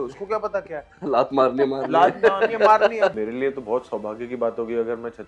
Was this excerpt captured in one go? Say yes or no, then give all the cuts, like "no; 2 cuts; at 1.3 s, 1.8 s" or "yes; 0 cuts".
no; 1 cut; at 3.2 s